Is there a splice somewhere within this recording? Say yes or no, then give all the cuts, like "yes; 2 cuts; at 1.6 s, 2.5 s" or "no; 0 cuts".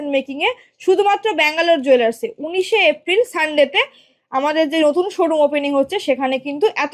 no; 0 cuts